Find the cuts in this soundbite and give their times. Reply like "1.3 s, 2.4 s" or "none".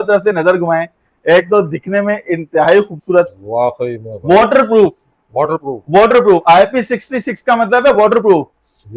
none